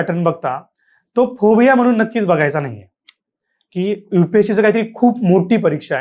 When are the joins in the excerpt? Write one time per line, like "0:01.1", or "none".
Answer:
none